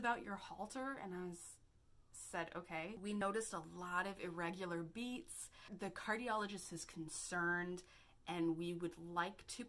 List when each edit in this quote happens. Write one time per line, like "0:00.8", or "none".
0:03.2
0:05.7